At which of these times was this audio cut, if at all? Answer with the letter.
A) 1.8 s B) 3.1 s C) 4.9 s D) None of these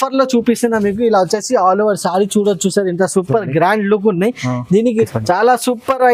C